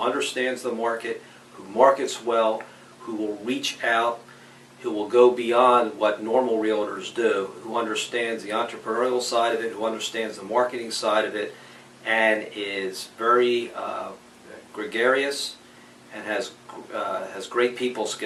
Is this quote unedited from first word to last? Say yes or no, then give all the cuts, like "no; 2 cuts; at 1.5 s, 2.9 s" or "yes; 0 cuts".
yes; 0 cuts